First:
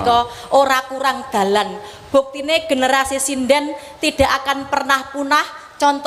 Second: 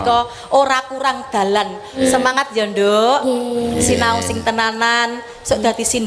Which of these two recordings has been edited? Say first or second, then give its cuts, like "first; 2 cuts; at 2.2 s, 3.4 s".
second; 1 cut; at 2.0 s